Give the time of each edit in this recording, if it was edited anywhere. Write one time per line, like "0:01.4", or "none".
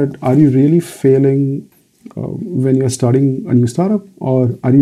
0:01.7